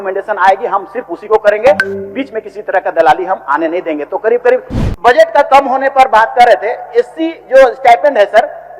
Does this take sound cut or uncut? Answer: cut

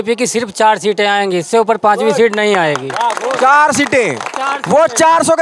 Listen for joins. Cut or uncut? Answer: uncut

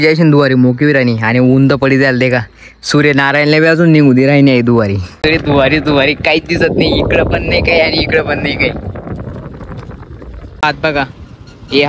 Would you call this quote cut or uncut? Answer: cut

